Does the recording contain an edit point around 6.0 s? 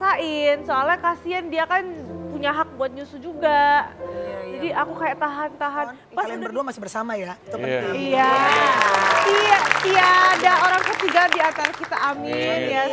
yes; 1 cut; at 6.0 s

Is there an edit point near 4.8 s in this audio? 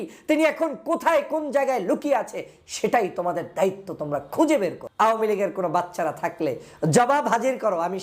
yes; 1 cut; at 4.8 s

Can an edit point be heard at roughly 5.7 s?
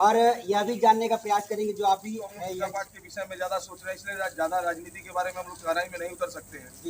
no; 1 cut; at 2.6 s

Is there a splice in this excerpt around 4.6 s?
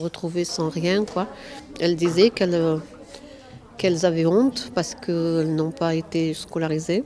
yes; 1 cut; at 4.6 s

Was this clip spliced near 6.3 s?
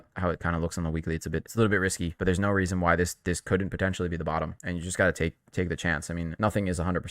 yes; 4 cuts; at 1.5 s, 2.1 s, 4.6 s, 6.3 s

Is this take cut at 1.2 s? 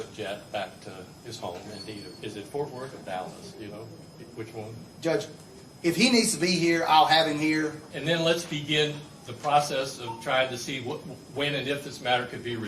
no; 1 cut; at 7.9 s

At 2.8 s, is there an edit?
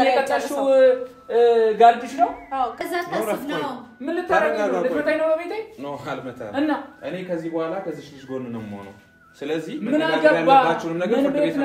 yes; 1 cut; at 2.8 s

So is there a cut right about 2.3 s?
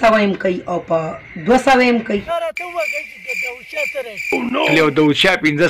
yes; 1 cut; at 2.3 s

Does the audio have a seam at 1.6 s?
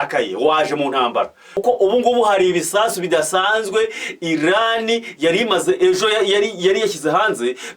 yes; 1 cut; at 1.6 s

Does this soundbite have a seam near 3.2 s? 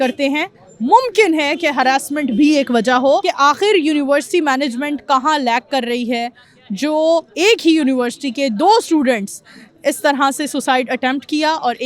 yes; 1 cut; at 3.2 s

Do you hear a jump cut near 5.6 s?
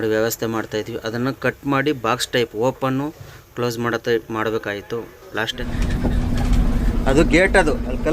yes; 1 cut; at 5.6 s

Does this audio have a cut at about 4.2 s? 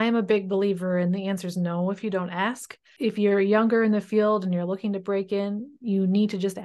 no; 1 cut; at 2.8 s

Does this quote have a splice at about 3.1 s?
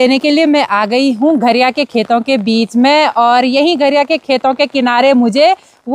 no; 0 cuts

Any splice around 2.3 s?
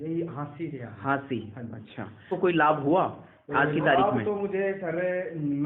yes; 1 cut; at 2.3 s

